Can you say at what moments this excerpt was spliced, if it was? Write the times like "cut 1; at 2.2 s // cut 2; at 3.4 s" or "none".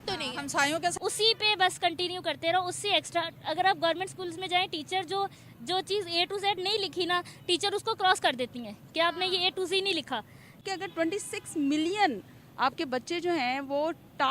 cut 1; at 0.9 s // cut 2; at 10.6 s